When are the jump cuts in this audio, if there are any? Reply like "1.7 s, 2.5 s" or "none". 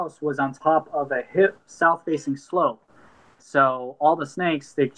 none